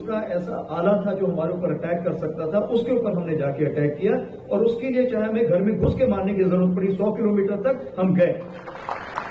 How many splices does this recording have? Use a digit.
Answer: 0